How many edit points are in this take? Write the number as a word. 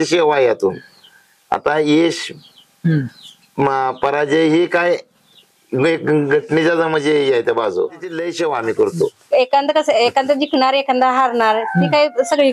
one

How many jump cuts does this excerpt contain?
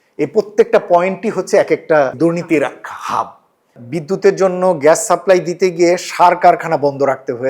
two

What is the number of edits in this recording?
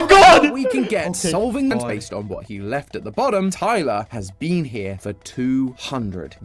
one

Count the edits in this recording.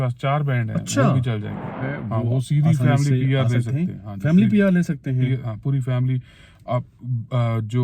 one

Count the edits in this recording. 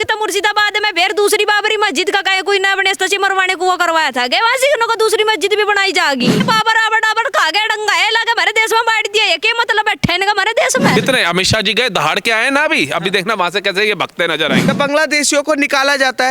three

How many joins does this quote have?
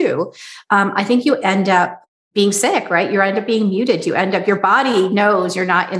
one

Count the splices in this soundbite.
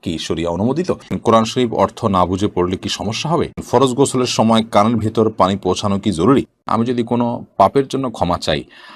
three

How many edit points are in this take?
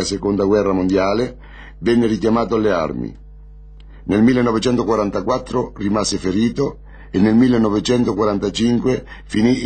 one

